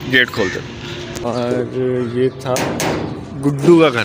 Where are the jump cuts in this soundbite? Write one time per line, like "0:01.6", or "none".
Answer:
0:01.2